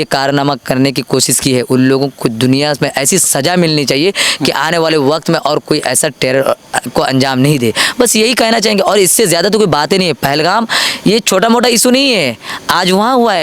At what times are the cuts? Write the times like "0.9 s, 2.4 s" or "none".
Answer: none